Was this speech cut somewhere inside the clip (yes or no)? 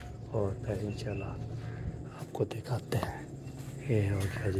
no